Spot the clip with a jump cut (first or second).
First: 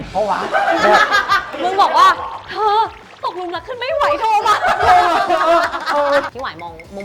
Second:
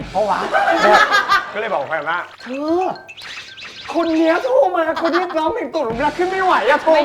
first